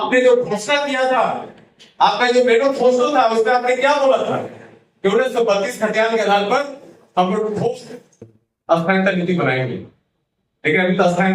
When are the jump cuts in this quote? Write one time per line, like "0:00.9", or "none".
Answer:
none